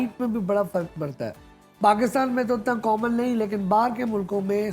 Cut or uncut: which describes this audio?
uncut